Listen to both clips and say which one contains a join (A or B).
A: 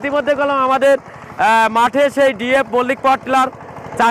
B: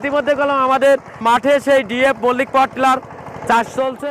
B